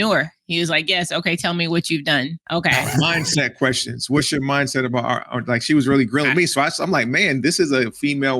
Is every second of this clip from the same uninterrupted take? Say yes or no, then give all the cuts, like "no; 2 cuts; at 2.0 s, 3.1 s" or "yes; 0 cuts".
no; 1 cut; at 2.4 s